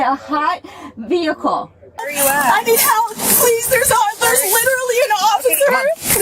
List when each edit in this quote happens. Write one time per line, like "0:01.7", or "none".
0:02.0